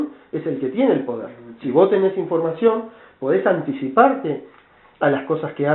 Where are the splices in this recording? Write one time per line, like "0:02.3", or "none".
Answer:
none